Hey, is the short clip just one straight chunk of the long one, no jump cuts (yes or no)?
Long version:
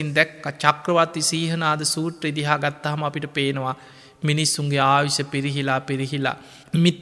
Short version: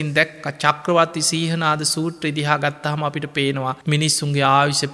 no